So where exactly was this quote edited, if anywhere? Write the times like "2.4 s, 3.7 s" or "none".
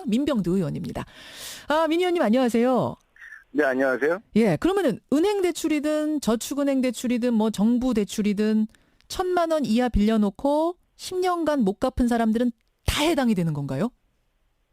13.3 s